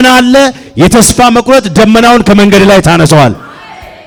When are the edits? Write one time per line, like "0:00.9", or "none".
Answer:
none